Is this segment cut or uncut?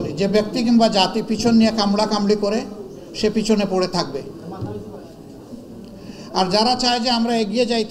uncut